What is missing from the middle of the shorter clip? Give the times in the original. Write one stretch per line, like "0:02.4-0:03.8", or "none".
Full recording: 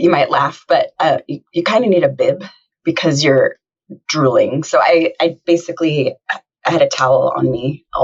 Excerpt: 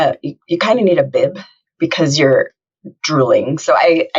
none